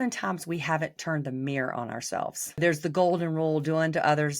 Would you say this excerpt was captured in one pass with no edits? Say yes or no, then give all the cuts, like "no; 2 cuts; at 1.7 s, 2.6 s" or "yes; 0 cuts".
no; 1 cut; at 2.6 s